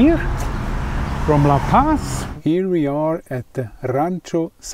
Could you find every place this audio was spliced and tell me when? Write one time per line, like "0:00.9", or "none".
0:02.2